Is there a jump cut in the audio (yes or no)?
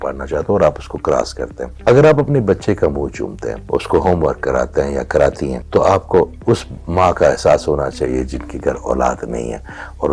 yes